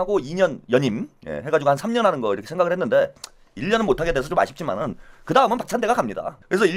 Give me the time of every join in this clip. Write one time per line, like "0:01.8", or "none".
none